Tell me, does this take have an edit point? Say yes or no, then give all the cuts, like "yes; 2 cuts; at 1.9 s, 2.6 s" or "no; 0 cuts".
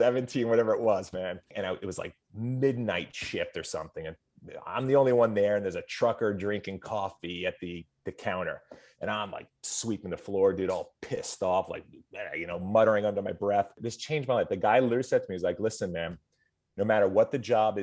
yes; 2 cuts; at 1.5 s, 13.9 s